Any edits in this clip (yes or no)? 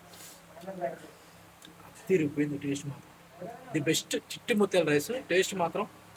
no